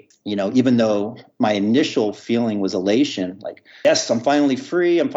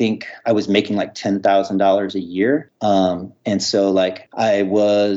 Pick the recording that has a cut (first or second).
second